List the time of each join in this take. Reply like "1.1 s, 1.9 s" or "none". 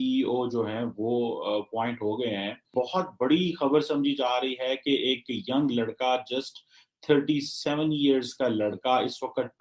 2.7 s